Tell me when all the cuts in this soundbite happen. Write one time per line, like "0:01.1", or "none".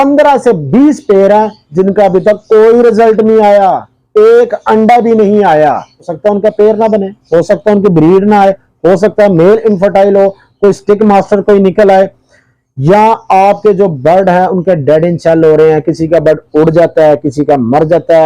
0:06.0